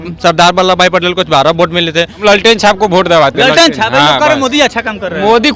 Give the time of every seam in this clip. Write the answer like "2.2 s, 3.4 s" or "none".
2.1 s